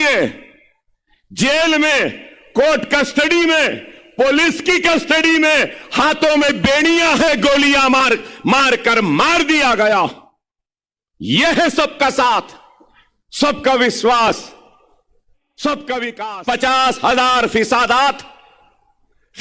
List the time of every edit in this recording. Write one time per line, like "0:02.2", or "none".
0:16.2